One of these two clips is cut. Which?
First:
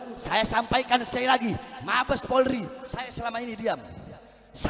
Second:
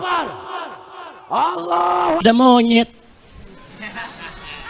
second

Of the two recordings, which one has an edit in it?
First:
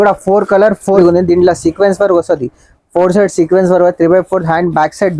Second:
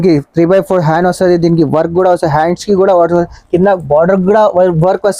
first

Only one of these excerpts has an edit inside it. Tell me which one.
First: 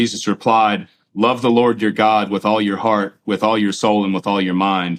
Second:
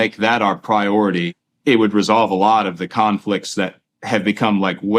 second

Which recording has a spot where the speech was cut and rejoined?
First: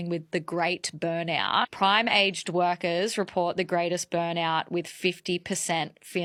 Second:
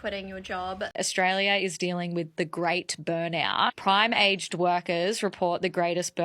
second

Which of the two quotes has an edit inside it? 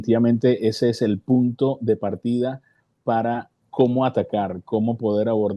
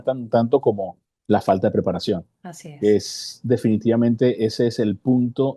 first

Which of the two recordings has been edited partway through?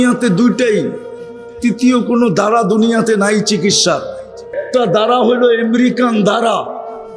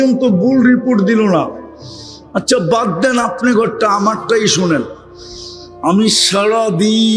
first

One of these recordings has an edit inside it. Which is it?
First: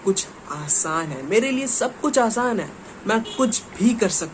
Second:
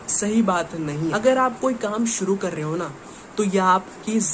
second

